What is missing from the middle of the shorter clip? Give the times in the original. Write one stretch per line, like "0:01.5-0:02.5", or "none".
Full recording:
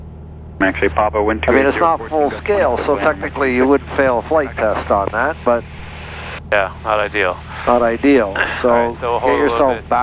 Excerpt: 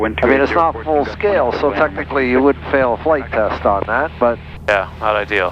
0:05.8-0:06.3